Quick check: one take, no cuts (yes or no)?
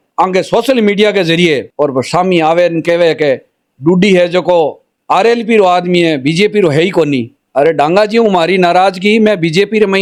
yes